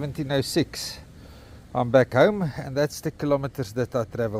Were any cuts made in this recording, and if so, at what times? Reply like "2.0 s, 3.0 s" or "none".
none

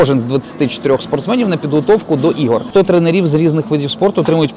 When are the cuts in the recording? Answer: 2.7 s

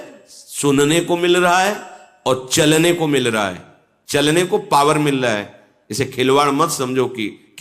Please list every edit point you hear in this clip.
none

